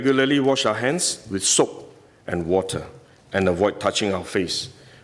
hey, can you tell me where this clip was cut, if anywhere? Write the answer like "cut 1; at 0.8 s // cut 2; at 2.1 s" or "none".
none